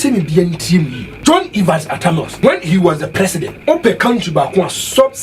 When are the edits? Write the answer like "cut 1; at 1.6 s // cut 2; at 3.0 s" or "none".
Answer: cut 1; at 1.0 s // cut 2; at 2.3 s // cut 3; at 3.5 s